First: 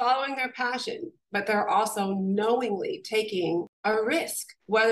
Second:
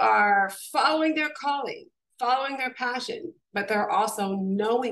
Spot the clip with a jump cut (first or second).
first